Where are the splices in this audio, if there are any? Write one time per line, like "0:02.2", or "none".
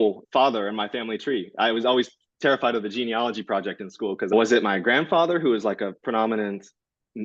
0:04.3